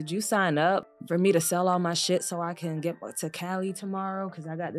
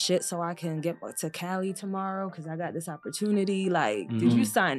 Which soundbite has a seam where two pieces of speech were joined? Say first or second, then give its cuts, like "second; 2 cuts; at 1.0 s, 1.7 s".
first; 1 cut; at 0.9 s